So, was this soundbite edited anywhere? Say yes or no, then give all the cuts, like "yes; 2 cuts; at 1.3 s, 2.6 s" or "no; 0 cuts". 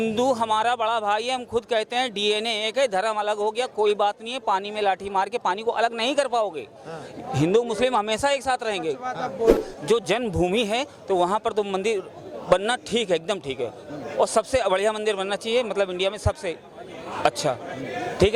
yes; 1 cut; at 9.5 s